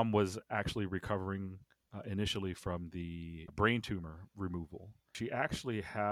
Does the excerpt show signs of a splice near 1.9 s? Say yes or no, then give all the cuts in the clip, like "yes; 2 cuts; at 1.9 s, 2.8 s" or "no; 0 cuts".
no; 2 cuts; at 3.4 s, 5.1 s